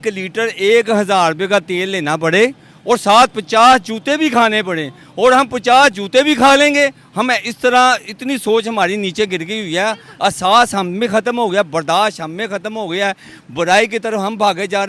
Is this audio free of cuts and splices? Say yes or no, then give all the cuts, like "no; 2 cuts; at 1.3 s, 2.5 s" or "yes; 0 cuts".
yes; 0 cuts